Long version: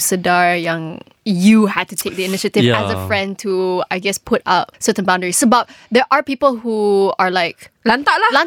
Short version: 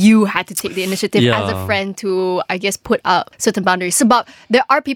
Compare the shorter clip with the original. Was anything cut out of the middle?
no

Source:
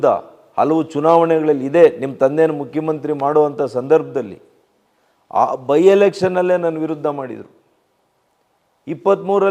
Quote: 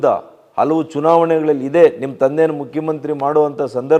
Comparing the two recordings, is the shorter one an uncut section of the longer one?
yes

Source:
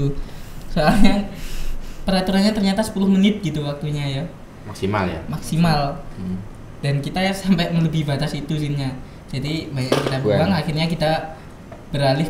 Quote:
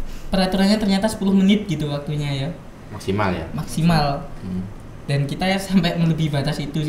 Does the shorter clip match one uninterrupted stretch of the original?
yes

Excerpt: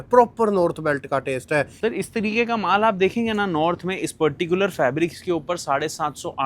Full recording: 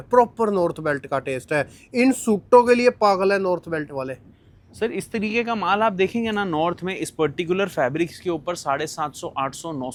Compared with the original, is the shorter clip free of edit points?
no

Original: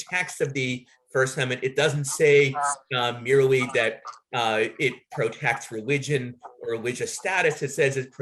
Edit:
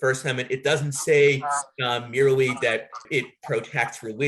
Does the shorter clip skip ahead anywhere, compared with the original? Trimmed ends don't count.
yes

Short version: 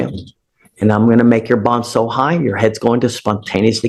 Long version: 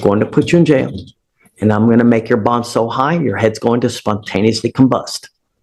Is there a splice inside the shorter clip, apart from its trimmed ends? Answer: no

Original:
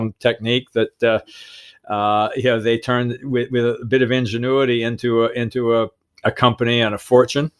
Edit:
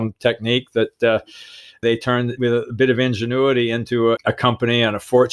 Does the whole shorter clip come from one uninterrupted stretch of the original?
no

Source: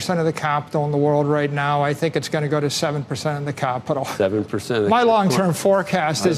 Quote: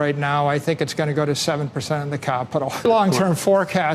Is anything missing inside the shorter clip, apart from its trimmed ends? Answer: yes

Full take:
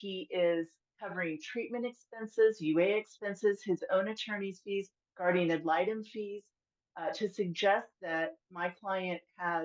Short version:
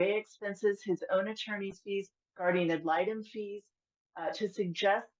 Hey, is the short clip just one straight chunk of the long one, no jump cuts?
yes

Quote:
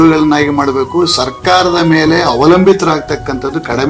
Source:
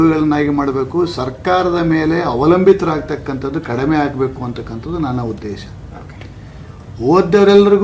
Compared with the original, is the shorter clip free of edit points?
yes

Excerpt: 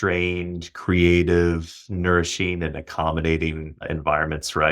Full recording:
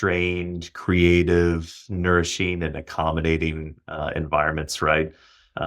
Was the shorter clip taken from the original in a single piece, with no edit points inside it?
no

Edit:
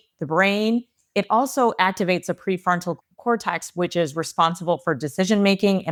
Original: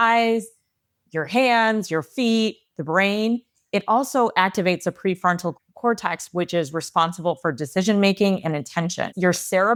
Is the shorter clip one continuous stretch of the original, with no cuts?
yes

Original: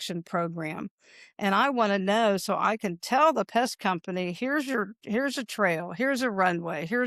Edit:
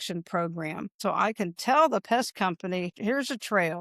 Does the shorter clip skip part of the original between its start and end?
yes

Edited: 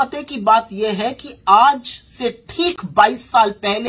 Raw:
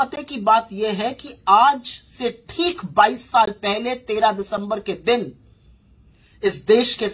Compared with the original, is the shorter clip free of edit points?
yes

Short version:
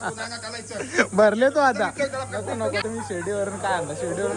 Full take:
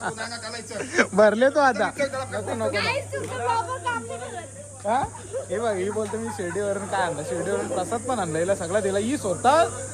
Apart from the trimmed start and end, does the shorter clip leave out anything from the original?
yes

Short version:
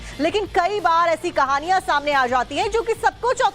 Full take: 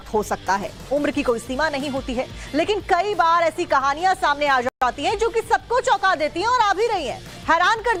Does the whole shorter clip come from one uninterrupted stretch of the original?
no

